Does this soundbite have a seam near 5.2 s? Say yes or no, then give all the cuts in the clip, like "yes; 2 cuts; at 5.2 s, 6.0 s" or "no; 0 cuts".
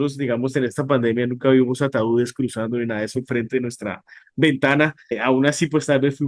yes; 1 cut; at 5.2 s